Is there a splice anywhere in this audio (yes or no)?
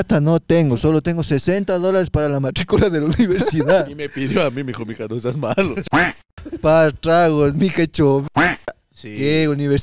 no